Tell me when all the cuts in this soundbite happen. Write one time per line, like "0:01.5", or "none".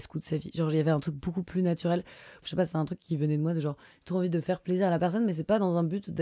0:02.4